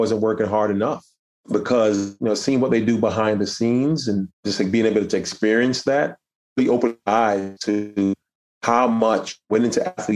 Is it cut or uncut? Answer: cut